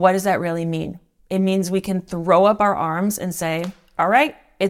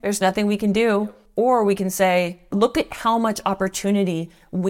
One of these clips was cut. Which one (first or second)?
second